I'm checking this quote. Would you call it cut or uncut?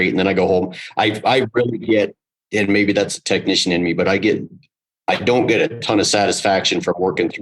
uncut